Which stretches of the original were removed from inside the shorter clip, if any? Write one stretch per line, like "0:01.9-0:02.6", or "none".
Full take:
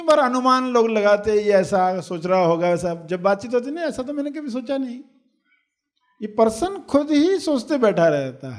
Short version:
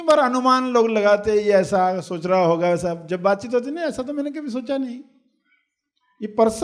none